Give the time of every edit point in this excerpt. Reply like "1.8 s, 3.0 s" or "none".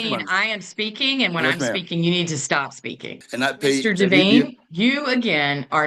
3.2 s